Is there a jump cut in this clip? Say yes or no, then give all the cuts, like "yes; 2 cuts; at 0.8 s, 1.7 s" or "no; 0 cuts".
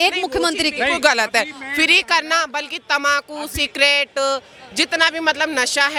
no; 0 cuts